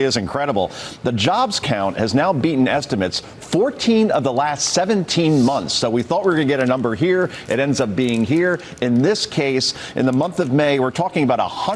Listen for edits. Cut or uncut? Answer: uncut